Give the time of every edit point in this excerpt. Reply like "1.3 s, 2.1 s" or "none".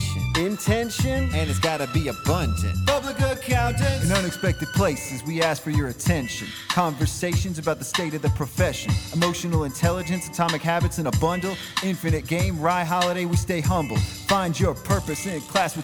none